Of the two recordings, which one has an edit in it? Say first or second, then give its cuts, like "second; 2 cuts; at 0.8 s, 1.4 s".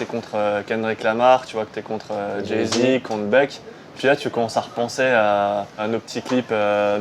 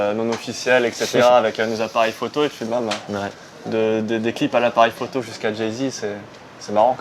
first; 2 cuts; at 4.0 s, 5.8 s